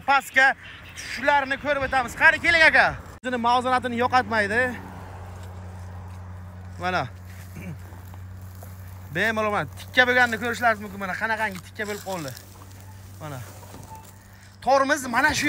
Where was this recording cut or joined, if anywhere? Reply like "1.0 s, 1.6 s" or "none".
3.2 s

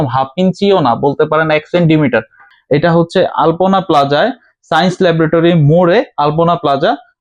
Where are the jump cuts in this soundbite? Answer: 2.5 s

